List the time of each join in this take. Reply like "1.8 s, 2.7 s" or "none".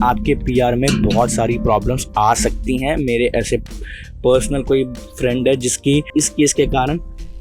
none